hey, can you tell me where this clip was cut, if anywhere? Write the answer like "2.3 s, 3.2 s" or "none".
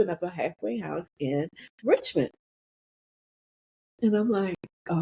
none